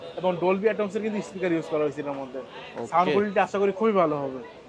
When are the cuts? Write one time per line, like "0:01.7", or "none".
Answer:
none